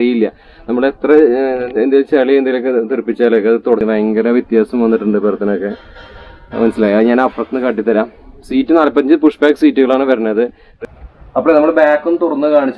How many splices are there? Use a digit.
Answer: 2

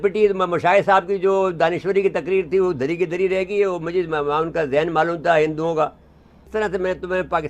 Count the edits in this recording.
1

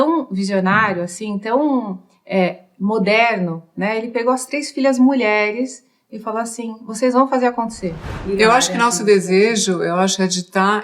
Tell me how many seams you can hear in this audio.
1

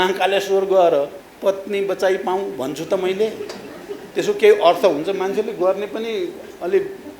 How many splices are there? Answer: 1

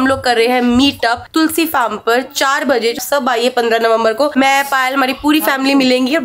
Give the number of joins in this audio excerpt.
1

